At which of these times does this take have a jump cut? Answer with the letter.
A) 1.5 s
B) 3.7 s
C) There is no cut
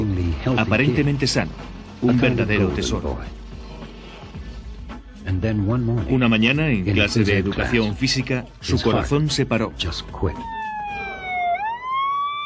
B